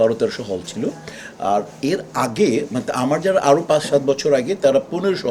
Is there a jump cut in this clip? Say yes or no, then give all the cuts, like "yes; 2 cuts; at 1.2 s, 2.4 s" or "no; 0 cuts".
no; 0 cuts